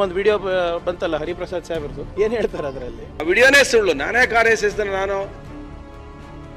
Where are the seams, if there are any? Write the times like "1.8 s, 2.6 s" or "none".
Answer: 2.0 s, 3.2 s, 5.5 s